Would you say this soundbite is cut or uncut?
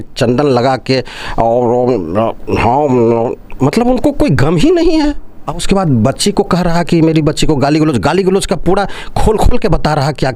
cut